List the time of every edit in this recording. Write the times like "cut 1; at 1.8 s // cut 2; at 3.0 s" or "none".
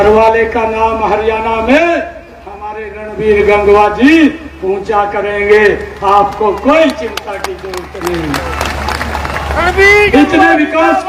none